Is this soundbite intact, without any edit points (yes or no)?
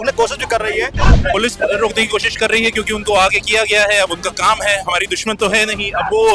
no